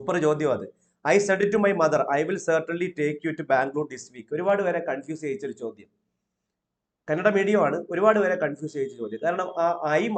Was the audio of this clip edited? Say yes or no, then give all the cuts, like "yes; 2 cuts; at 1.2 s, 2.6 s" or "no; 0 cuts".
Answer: no; 0 cuts